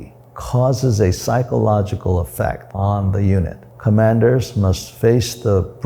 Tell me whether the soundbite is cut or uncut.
cut